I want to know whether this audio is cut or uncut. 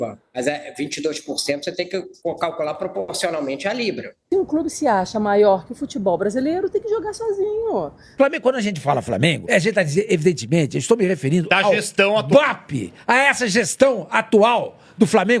cut